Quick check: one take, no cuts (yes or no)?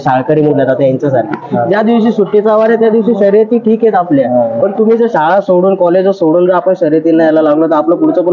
yes